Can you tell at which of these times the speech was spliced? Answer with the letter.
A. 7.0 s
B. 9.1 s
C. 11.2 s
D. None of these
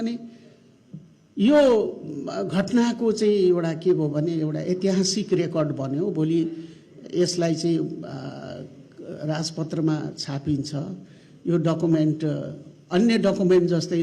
D